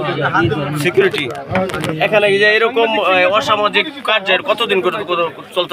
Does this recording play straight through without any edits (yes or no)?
yes